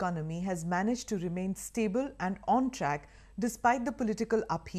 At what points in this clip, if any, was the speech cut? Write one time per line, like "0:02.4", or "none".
0:03.7